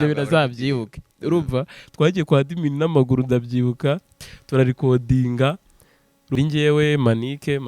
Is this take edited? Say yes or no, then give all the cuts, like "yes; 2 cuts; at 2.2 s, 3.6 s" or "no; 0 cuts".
yes; 1 cut; at 6.4 s